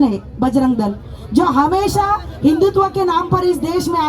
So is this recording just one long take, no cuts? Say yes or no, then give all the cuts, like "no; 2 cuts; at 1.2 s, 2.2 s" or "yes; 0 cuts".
yes; 0 cuts